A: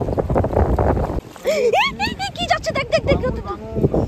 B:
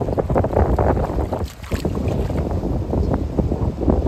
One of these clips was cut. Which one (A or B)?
A